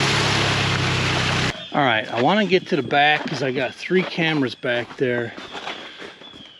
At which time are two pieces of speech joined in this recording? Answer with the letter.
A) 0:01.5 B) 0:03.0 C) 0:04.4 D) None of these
A